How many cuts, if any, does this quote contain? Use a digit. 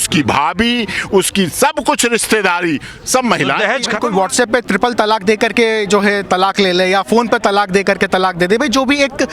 1